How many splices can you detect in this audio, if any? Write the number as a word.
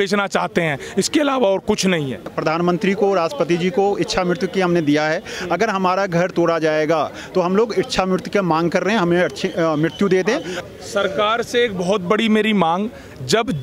two